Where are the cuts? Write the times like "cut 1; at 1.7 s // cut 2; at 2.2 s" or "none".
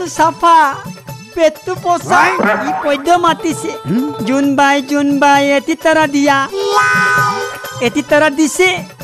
cut 1; at 2.7 s